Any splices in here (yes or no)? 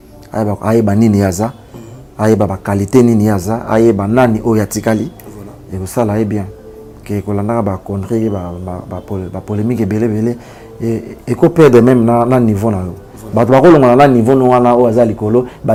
no